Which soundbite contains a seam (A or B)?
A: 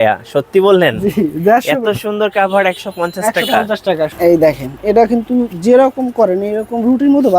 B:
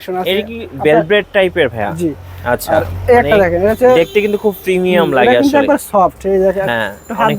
A